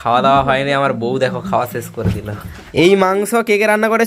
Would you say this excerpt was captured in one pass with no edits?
no; 1 cut; at 2.6 s

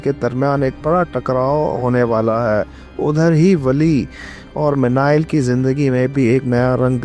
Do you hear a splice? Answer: no; 0 cuts

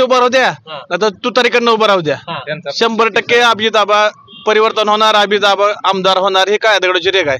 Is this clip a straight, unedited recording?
yes; 0 cuts

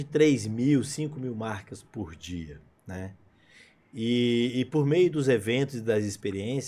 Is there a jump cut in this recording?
no; 0 cuts

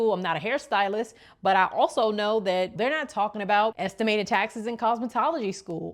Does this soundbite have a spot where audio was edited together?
yes; 1 cut; at 3.8 s

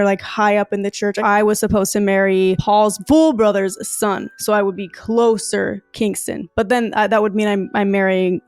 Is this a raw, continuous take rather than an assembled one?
no; 1 cut; at 1.2 s

